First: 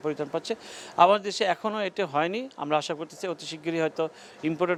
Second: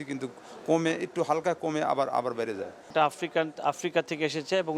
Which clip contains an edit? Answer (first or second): second